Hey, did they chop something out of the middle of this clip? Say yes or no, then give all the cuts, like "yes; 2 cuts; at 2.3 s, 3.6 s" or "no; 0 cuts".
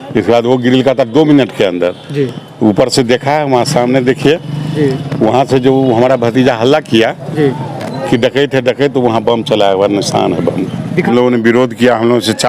yes; 1 cut; at 11.1 s